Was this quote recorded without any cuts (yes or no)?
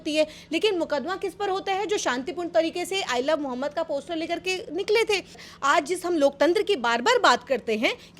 no